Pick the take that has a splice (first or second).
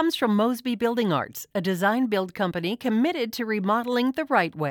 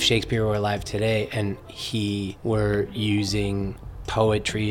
second